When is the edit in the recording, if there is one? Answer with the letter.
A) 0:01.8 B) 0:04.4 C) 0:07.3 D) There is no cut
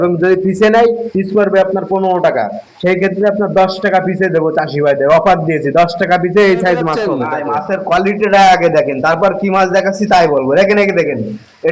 C